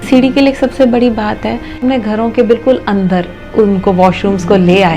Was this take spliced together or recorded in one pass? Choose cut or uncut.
cut